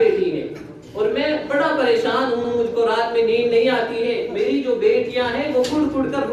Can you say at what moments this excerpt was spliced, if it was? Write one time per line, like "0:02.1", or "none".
none